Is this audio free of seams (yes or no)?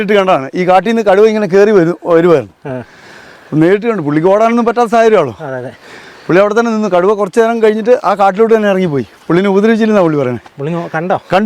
yes